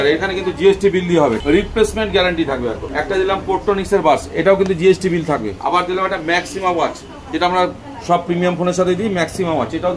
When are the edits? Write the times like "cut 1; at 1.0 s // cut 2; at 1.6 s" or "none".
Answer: cut 1; at 1.4 s // cut 2; at 2.9 s // cut 3; at 5.5 s